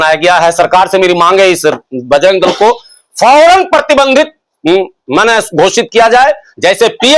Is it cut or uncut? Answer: uncut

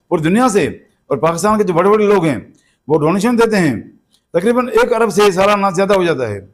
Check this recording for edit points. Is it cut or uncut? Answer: uncut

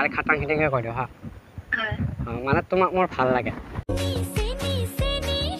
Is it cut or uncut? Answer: cut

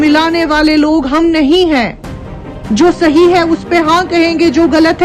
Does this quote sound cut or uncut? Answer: uncut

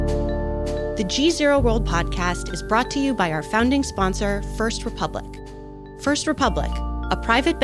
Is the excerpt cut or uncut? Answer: cut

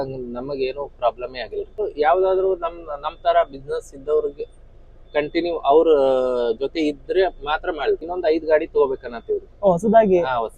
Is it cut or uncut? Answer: cut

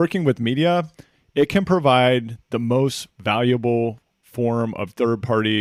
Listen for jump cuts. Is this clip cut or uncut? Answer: uncut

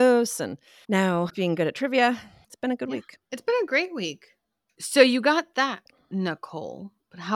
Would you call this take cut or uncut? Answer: uncut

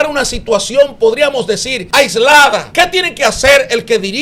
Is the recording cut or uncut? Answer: cut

